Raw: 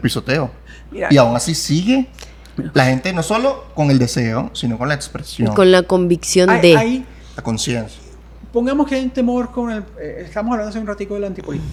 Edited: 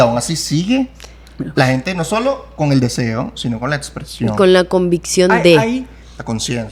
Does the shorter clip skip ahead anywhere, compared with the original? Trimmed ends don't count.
no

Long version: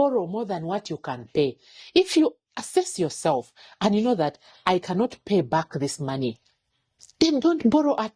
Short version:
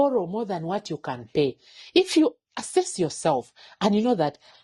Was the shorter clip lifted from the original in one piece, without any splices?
yes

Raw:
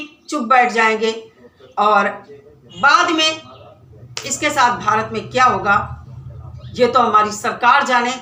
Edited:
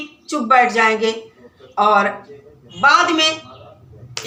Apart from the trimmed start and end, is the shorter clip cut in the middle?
no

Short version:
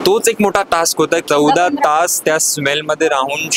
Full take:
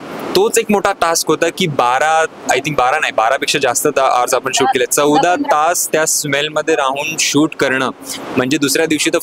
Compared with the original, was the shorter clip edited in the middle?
yes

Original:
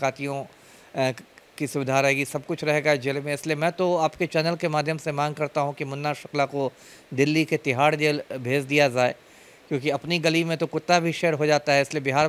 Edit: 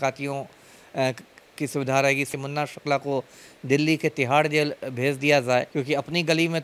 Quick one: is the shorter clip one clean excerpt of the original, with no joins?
no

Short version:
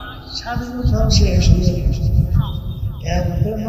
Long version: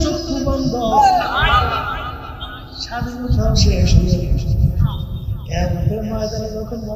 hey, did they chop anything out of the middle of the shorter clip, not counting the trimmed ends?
no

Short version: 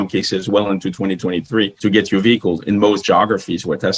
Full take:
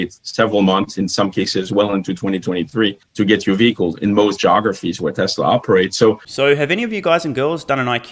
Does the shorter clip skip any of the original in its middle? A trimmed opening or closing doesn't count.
yes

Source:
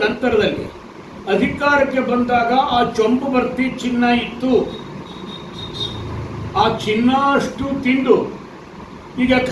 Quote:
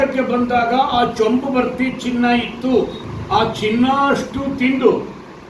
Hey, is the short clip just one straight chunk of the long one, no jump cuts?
no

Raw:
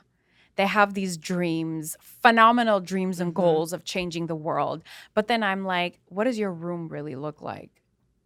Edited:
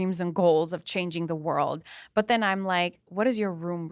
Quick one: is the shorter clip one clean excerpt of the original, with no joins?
yes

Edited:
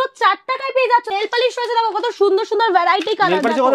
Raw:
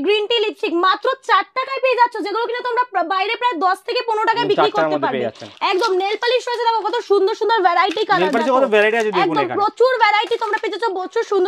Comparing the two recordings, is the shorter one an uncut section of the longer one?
no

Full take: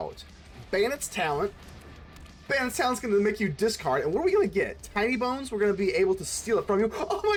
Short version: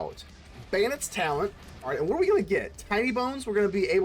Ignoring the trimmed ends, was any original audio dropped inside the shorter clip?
yes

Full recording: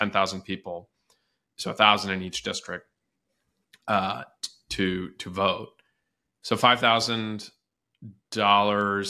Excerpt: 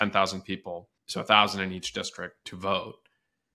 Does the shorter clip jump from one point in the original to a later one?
yes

